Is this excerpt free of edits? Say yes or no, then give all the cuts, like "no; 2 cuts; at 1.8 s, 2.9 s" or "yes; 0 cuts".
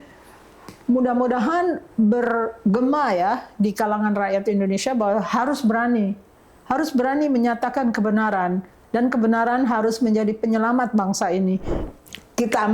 no; 1 cut; at 11.8 s